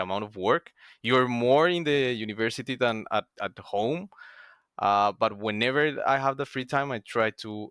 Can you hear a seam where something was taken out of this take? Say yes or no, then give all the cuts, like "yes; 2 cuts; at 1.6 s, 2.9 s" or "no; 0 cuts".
no; 0 cuts